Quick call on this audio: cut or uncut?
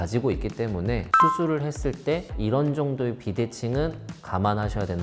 cut